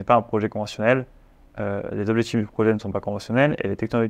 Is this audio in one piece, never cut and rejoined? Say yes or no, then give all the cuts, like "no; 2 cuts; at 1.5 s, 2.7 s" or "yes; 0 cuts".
yes; 0 cuts